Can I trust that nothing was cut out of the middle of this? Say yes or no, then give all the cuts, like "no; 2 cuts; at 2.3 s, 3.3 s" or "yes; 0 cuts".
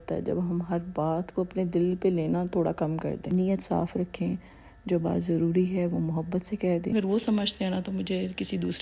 no; 2 cuts; at 3.3 s, 6.9 s